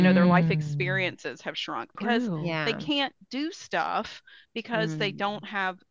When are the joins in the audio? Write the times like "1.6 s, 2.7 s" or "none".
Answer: 1.9 s